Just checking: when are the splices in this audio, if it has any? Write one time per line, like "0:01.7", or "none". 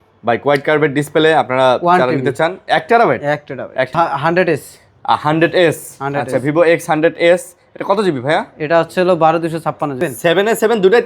0:03.9
0:10.0